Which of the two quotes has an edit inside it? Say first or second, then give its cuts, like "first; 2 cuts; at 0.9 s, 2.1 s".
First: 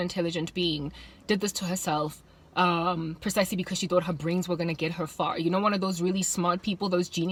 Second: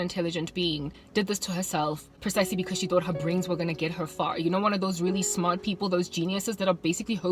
second; 2 cuts; at 1.0 s, 2.1 s